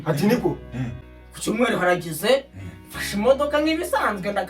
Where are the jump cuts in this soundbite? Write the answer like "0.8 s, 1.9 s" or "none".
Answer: 1.1 s